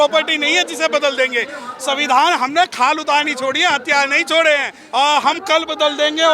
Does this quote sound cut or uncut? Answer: cut